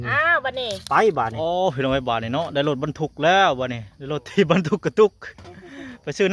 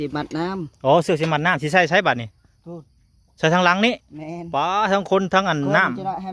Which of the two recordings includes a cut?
first; 1 cut; at 1.3 s

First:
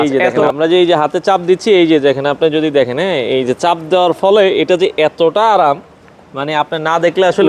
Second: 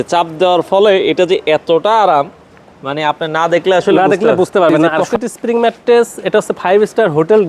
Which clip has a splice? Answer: second; 1 cut; at 5.0 s

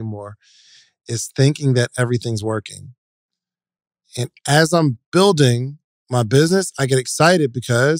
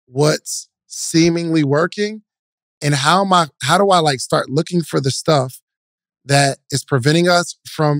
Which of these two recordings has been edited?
first; 1 cut; at 3.4 s

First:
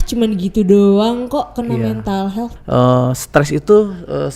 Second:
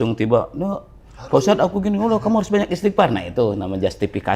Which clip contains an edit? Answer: first; 1 cut; at 2.5 s

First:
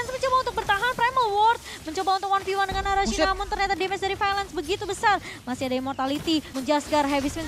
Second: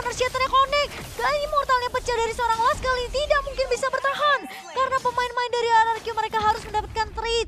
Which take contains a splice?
first; 1 cut; at 6.5 s

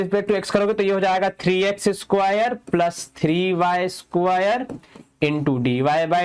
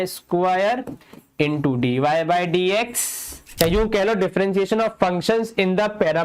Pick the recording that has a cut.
second; 1 cut; at 3.4 s

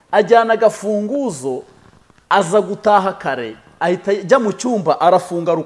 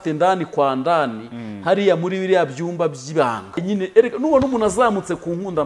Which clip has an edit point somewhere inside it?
second; 1 cut; at 3.6 s

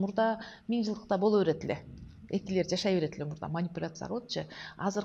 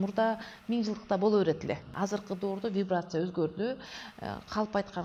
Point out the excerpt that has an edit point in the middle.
second; 1 cut; at 1.9 s

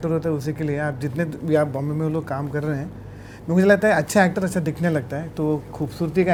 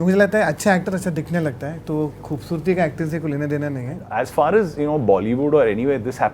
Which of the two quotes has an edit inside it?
second; 1 cut; at 4.1 s

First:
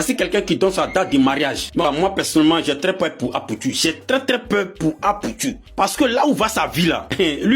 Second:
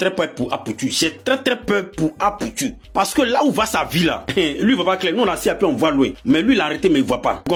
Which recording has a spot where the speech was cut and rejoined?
first; 1 cut; at 1.8 s

